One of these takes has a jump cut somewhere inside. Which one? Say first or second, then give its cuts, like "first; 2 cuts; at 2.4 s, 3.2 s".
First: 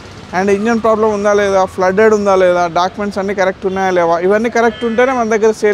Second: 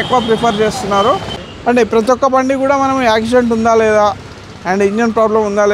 second; 1 cut; at 1.4 s